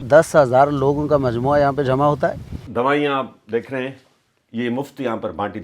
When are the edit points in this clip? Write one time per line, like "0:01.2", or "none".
0:02.6